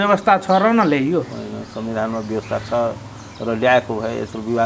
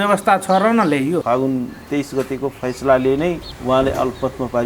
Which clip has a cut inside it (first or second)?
second